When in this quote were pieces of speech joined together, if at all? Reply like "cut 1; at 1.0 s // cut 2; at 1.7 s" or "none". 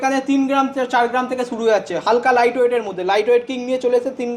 none